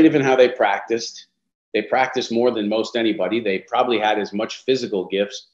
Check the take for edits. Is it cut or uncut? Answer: uncut